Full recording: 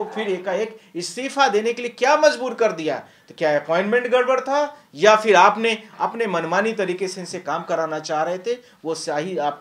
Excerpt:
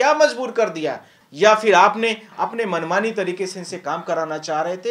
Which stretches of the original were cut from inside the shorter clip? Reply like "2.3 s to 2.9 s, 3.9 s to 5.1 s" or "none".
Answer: 3.2 s to 4.8 s